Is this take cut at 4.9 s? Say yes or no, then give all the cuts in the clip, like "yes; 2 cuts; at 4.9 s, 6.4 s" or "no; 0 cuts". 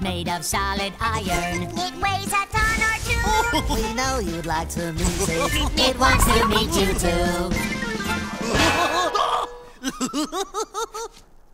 yes; 1 cut; at 4.9 s